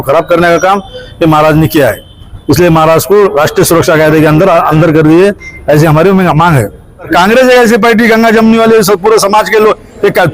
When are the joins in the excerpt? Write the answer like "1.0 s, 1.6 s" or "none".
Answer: 7.1 s